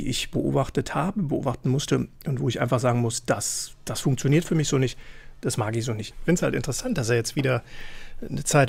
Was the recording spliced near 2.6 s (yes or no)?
yes